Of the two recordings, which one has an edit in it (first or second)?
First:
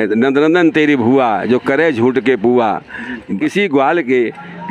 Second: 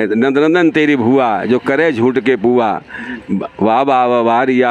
first